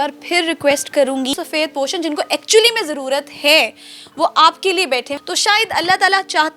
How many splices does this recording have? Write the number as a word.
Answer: two